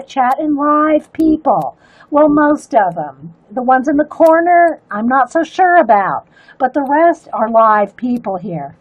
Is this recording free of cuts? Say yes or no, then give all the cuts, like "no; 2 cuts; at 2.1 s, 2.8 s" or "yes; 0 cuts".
yes; 0 cuts